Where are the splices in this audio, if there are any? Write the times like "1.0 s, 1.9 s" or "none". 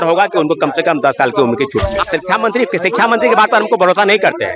2.0 s